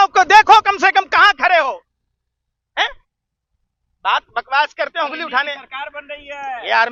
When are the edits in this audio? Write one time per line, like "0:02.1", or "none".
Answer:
none